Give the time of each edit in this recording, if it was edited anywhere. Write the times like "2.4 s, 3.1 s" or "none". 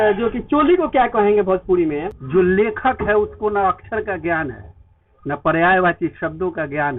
2.1 s